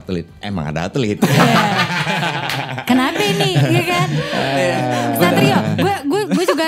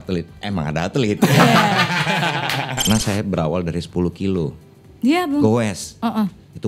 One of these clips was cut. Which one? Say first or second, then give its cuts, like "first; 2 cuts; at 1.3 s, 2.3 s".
second; 1 cut; at 2.7 s